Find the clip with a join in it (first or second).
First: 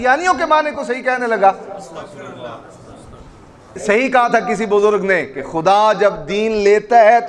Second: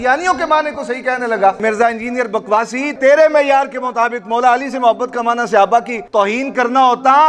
second